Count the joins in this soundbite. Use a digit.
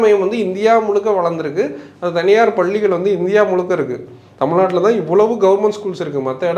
0